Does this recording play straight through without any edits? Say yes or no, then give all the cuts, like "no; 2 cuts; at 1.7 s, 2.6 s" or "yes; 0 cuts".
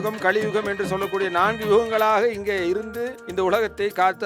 yes; 0 cuts